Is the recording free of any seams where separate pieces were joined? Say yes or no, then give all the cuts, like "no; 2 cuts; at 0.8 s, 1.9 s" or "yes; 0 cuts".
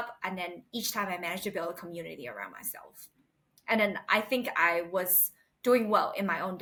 yes; 0 cuts